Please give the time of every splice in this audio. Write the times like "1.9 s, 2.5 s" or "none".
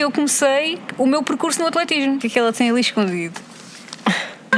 2.2 s